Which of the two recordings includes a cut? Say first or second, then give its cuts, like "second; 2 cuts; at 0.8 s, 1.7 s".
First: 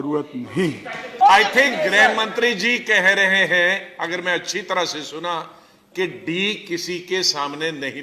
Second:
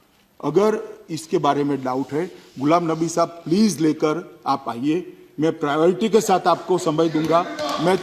first; 1 cut; at 1.1 s